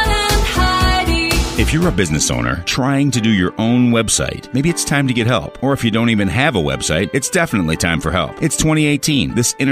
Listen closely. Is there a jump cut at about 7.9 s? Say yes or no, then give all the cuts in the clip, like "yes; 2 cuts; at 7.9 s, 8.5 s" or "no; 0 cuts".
no; 1 cut; at 1.5 s